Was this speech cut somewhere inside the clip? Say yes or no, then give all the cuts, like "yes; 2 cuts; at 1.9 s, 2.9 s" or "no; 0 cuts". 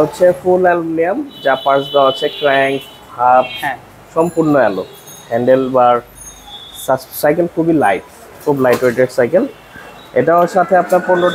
no; 0 cuts